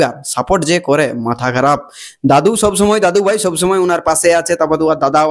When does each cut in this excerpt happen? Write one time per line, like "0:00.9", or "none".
none